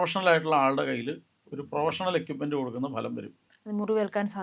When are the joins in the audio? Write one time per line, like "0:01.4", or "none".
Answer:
0:03.4